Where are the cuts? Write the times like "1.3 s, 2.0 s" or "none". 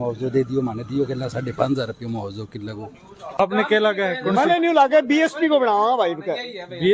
3.4 s